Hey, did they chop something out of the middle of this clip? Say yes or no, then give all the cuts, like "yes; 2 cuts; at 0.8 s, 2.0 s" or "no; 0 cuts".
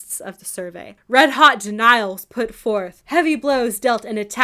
yes; 2 cuts; at 0.9 s, 3.0 s